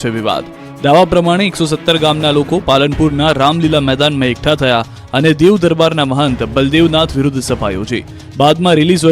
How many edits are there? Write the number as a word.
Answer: one